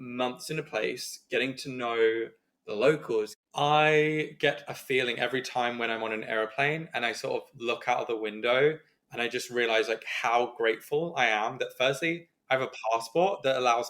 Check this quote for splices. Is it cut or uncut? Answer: cut